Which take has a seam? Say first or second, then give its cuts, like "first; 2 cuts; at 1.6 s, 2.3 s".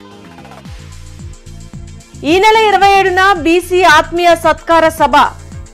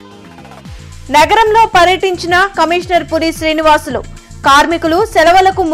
second; 1 cut; at 0.9 s